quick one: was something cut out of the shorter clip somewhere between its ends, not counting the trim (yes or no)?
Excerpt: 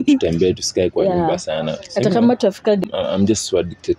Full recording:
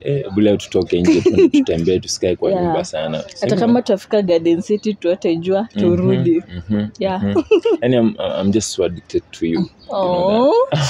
yes